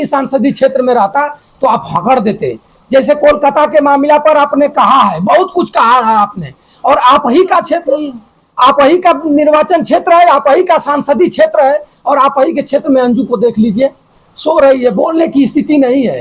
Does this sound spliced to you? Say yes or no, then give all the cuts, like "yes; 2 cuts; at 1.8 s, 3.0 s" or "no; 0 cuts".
no; 0 cuts